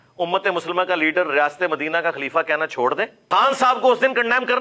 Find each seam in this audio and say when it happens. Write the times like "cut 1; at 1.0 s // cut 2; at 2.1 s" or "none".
cut 1; at 3.2 s